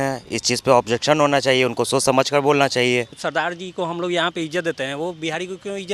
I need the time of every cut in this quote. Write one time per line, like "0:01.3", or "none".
0:03.2